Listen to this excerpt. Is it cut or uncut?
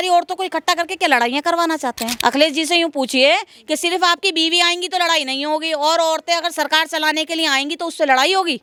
uncut